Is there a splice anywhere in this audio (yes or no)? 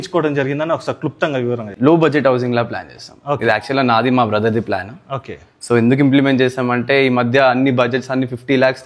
yes